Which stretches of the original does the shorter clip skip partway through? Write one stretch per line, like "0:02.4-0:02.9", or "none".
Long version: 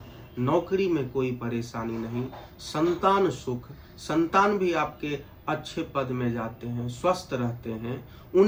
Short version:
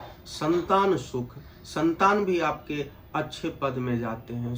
none